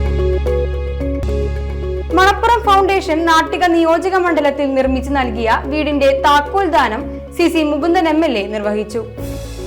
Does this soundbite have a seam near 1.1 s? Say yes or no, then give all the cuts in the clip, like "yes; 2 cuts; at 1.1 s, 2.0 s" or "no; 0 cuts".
yes; 1 cut; at 1.1 s